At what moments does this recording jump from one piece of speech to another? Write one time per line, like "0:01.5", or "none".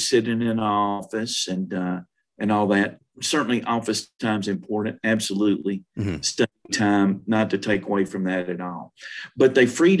none